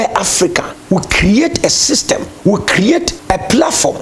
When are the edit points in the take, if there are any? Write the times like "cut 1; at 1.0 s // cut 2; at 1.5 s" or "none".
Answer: none